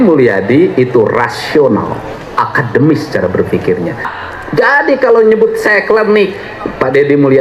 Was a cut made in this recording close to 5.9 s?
no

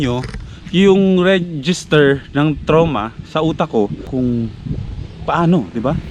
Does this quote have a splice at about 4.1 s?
yes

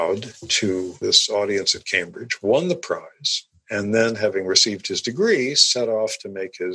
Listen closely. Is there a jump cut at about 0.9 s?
yes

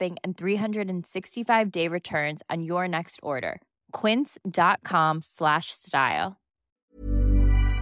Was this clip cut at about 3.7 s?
no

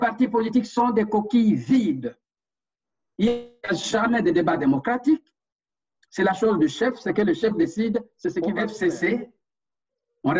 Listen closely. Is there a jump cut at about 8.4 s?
yes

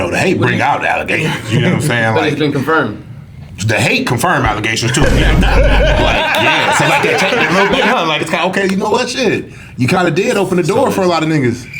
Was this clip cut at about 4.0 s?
no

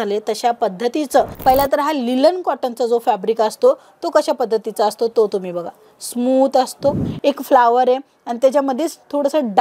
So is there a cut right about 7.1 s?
yes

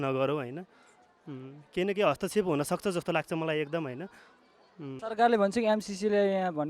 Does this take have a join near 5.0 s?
yes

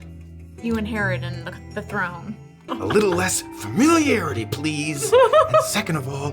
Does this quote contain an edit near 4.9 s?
no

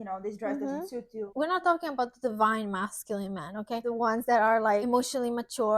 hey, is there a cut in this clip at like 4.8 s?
yes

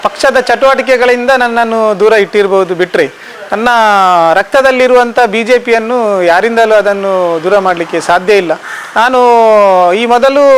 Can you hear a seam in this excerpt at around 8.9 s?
no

